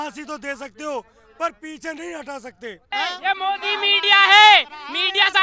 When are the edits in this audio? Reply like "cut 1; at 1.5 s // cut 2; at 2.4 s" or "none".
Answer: cut 1; at 2.9 s

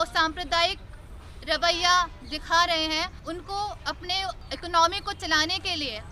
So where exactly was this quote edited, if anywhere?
cut 1; at 3.2 s // cut 2; at 4.5 s

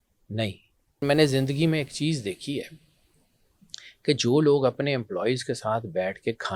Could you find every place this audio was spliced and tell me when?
cut 1; at 1.0 s

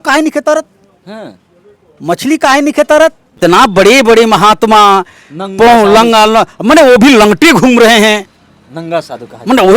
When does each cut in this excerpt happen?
cut 1; at 3.4 s

